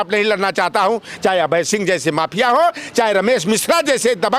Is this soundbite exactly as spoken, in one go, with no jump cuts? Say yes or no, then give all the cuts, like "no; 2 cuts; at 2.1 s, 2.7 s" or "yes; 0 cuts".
yes; 0 cuts